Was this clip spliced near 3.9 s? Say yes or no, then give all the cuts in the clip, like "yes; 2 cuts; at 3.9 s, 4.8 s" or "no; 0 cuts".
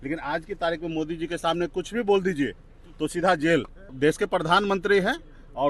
yes; 1 cut; at 3.9 s